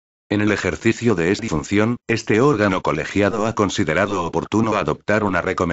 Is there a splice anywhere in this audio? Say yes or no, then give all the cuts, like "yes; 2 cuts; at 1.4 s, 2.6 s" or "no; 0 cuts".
no; 0 cuts